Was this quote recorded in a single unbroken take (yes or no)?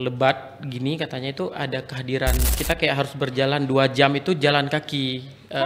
no